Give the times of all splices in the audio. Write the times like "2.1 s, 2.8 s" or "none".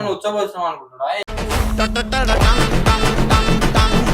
1.3 s